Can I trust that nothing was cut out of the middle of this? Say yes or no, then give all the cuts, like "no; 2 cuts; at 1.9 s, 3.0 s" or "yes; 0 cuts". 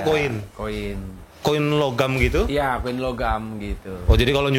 no; 1 cut; at 1.4 s